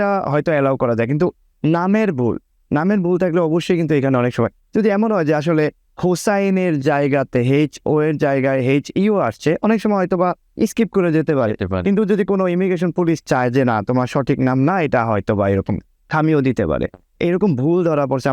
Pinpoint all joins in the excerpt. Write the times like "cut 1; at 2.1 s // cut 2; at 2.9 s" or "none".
cut 1; at 17.0 s

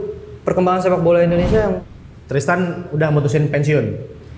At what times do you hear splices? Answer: cut 1; at 1.8 s

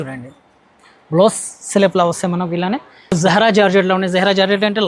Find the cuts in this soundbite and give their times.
cut 1; at 3.2 s

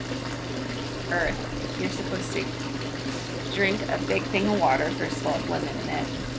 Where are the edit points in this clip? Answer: none

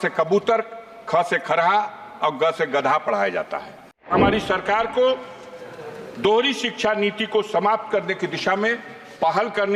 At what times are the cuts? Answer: cut 1; at 4.1 s

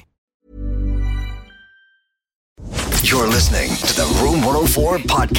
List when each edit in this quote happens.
cut 1; at 2.6 s

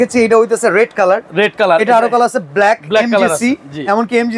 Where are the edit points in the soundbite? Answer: none

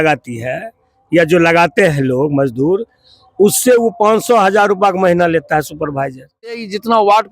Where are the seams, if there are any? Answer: cut 1; at 6.4 s

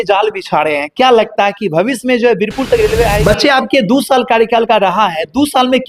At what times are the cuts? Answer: cut 1; at 3.2 s

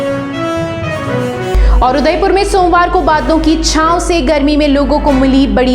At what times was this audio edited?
cut 1; at 1.2 s

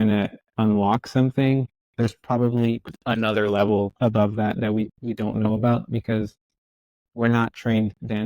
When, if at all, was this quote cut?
cut 1; at 1.8 s

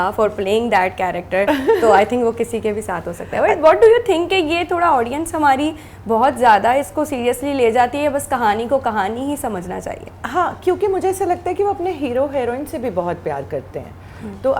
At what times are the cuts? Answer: none

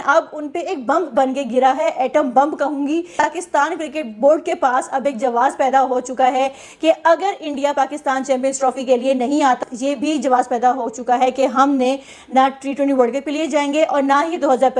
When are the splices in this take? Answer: cut 1; at 3.1 s // cut 2; at 9.6 s

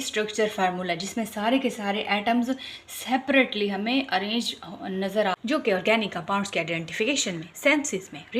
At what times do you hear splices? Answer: cut 1; at 5.3 s

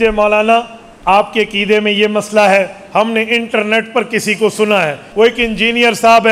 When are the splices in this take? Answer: cut 1; at 5.0 s

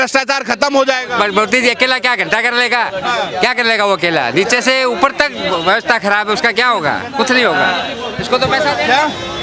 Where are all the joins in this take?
none

